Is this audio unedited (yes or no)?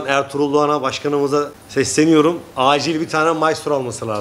no